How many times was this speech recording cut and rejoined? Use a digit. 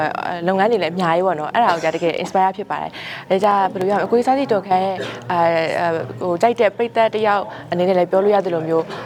0